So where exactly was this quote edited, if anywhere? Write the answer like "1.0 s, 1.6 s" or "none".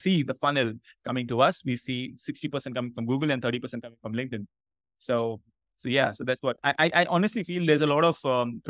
none